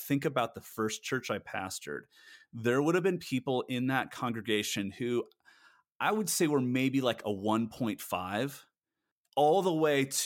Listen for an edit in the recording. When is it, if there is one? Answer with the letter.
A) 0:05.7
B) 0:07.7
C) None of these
C